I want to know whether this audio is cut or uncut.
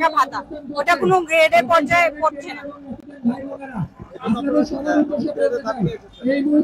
uncut